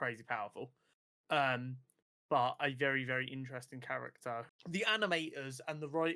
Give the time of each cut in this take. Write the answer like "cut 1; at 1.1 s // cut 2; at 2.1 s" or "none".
cut 1; at 4.5 s